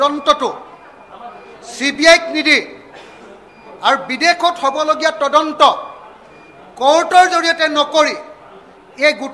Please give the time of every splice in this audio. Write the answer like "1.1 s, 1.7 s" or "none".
none